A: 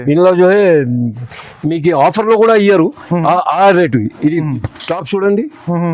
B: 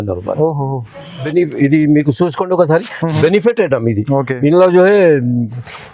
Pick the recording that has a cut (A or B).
B